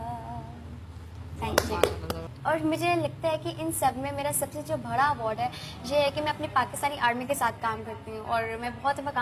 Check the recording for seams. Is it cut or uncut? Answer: cut